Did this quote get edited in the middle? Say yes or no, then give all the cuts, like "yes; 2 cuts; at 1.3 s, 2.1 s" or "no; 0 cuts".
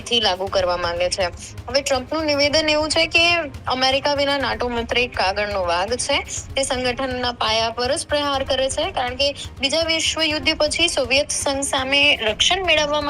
no; 0 cuts